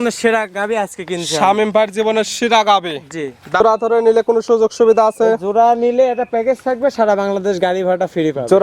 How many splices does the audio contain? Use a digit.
1